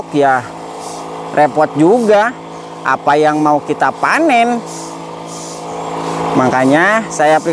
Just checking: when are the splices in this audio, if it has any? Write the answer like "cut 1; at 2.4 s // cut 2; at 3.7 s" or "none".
none